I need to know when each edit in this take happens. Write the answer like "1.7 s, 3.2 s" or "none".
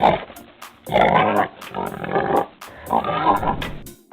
1.6 s